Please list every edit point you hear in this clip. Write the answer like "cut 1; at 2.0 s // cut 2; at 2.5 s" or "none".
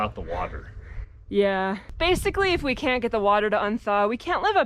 cut 1; at 1.9 s